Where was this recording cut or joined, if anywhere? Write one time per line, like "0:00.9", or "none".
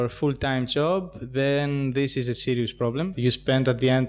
0:03.1